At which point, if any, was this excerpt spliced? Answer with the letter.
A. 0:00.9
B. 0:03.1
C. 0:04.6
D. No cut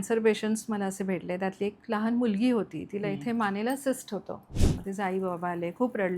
C